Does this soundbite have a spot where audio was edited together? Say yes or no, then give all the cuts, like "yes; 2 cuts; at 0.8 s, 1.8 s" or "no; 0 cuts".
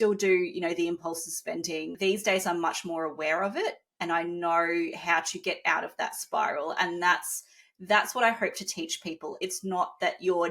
yes; 1 cut; at 1.9 s